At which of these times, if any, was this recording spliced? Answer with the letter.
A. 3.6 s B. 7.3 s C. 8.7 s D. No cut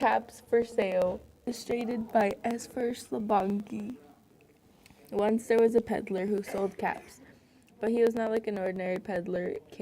C